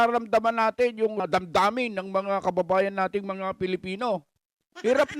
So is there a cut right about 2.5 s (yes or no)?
no